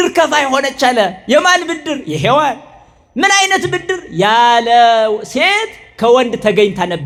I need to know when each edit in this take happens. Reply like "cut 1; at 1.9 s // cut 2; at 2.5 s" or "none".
none